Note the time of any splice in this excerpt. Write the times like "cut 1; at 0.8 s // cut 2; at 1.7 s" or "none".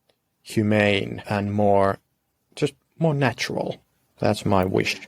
cut 1; at 1.2 s // cut 2; at 4.1 s